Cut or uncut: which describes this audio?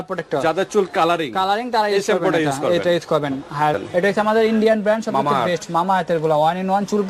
cut